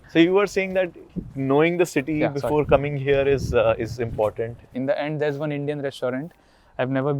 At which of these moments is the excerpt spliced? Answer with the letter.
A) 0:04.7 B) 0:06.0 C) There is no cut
A